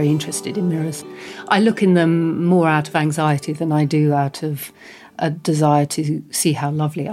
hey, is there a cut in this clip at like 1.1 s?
yes; 1 cut; at 1.1 s

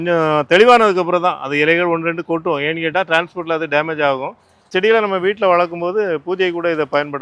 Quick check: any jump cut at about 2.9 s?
no; 1 cut; at 4.5 s

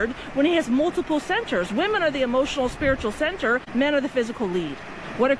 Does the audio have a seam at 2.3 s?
no; 1 cut; at 3.7 s

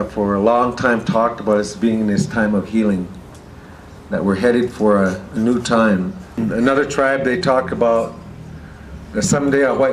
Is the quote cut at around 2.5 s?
no; 1 cut; at 7.6 s

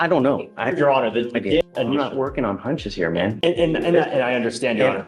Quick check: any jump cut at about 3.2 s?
no; 1 cut; at 1.6 s

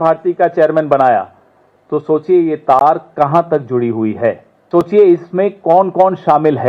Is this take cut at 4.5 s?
yes; 1 cut; at 4.5 s

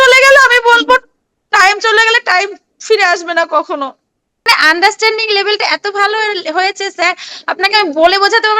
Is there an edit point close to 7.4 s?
no; 1 cut; at 4.5 s

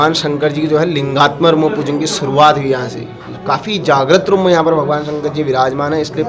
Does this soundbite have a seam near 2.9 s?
no; 0 cuts

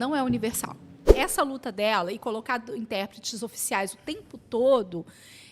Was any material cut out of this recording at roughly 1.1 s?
yes; 1 cut; at 1.1 s

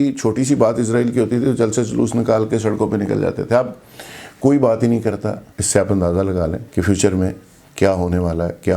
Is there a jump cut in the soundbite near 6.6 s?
yes; 2 cuts; at 5.5 s, 6.6 s

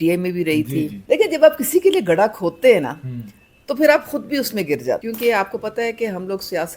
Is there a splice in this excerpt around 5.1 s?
yes; 2 cuts; at 0.9 s, 5.1 s

